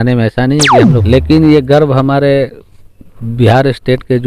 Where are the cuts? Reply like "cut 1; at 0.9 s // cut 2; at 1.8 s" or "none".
cut 1; at 1.0 s